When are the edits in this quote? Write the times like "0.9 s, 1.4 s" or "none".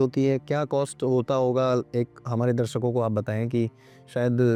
none